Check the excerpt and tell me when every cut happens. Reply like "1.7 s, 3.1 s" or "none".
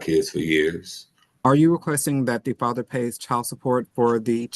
1.4 s